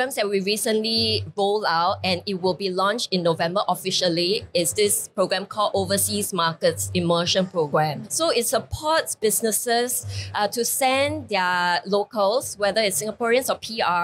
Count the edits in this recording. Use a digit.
0